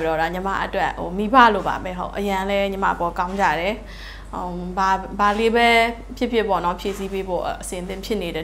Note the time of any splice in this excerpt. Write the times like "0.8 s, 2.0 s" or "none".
none